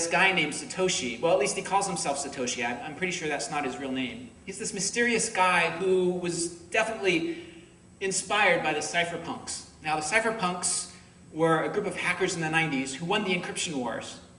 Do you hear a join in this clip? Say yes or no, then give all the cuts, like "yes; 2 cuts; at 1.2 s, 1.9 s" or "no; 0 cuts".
yes; 1 cut; at 1.4 s